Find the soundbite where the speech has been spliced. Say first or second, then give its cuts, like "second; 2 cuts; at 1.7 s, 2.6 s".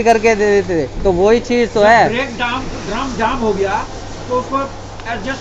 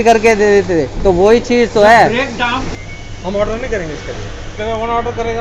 second; 1 cut; at 2.7 s